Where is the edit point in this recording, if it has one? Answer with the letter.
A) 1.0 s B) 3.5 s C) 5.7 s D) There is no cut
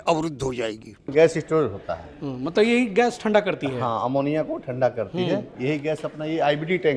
A